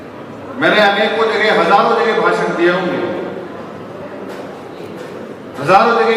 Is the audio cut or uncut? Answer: uncut